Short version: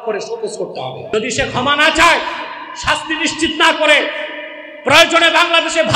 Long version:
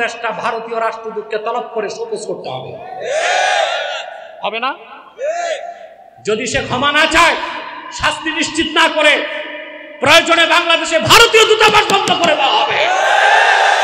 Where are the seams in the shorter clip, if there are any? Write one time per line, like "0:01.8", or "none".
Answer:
0:01.1